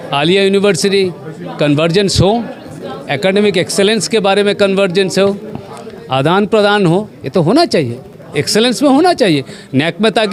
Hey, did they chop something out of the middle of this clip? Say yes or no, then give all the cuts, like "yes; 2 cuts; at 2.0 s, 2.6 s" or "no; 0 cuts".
no; 0 cuts